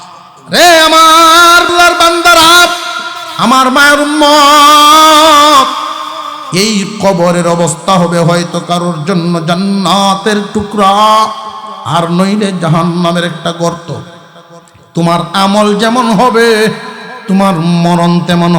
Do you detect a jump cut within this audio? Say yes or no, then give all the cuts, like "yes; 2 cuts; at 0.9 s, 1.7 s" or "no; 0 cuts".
yes; 1 cut; at 1.7 s